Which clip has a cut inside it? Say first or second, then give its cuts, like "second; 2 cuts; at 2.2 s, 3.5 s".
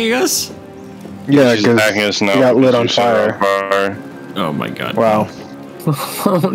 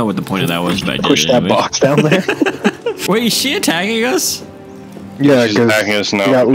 second; 1 cut; at 3.0 s